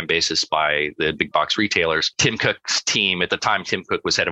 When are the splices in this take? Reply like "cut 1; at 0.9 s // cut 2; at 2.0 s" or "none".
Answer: cut 1; at 2.1 s